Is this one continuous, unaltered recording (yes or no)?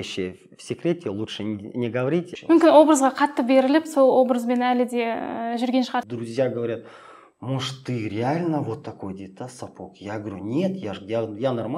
no